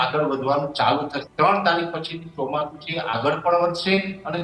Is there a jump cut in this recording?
yes; 1 cut; at 1.2 s

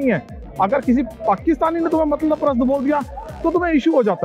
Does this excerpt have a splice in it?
no; 0 cuts

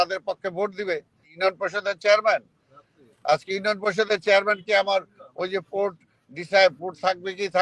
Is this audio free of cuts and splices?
no; 1 cut; at 1.3 s

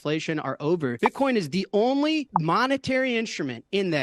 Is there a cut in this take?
yes; 1 cut; at 0.9 s

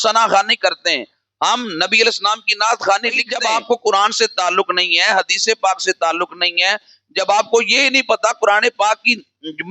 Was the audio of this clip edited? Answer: yes; 1 cut; at 3.3 s

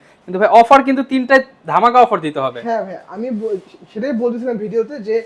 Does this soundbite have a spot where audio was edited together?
no; 0 cuts

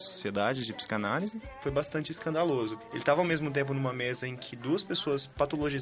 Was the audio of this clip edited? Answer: yes; 2 cuts; at 1.5 s, 2.8 s

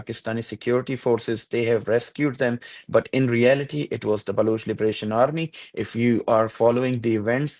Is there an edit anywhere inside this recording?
no; 0 cuts

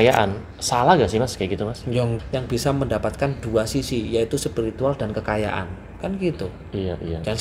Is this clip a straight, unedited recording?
no; 1 cut; at 2.1 s

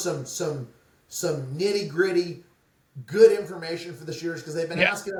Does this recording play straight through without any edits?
yes; 0 cuts

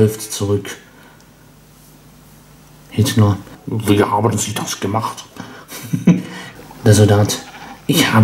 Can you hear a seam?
yes; 2 cuts; at 3.6 s, 6.4 s

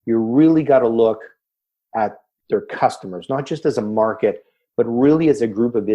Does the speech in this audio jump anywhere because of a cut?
yes; 1 cut; at 2.3 s

